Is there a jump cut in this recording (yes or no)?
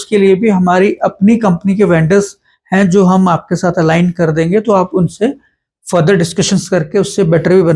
no